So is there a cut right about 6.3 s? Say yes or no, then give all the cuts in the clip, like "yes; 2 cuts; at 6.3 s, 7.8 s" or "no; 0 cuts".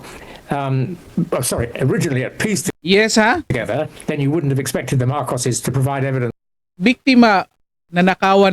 yes; 1 cut; at 6.3 s